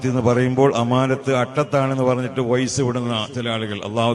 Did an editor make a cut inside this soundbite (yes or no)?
no